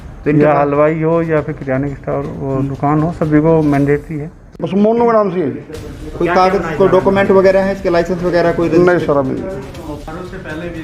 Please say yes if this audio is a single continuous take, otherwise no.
no